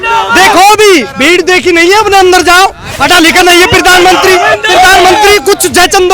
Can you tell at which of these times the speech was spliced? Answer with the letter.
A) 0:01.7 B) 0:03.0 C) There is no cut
B